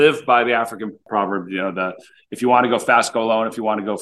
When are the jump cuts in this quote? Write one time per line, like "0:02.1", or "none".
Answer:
0:01.0